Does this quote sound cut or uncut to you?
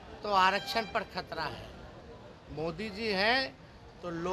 uncut